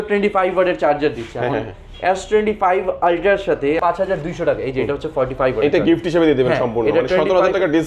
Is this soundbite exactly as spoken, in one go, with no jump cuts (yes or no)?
no